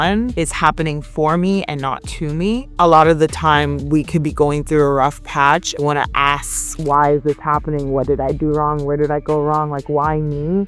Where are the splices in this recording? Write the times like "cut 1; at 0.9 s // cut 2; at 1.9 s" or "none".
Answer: none